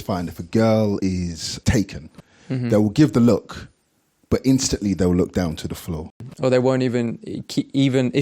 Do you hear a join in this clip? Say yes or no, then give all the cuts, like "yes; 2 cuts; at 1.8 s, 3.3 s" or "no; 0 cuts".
yes; 2 cuts; at 1.0 s, 6.1 s